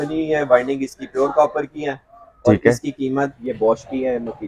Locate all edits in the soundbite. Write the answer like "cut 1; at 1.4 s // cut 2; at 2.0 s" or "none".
cut 1; at 3.4 s